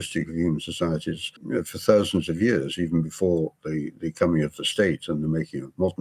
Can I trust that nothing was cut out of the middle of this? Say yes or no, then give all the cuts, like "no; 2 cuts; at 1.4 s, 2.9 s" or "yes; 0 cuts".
no; 1 cut; at 1.3 s